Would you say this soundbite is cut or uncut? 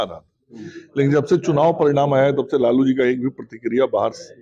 uncut